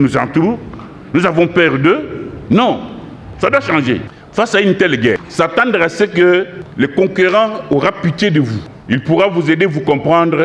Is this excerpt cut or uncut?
cut